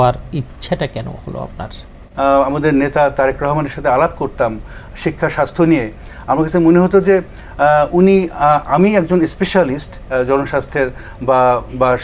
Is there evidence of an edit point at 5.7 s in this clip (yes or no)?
no